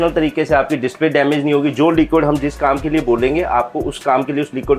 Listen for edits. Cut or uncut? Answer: uncut